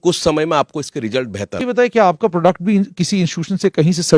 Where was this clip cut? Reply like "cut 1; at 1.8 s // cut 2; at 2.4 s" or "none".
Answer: cut 1; at 1.6 s